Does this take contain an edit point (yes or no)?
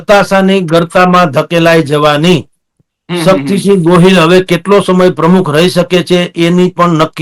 no